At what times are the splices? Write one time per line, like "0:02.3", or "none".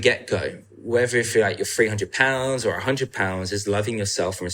none